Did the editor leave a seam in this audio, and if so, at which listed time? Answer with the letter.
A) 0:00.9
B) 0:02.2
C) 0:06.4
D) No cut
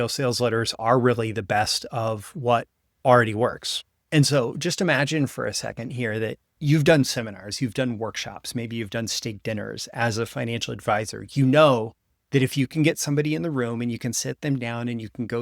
C